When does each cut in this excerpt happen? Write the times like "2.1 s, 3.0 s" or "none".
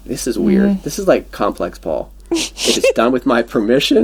none